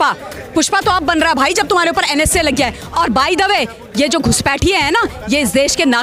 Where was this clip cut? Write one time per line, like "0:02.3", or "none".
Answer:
0:02.8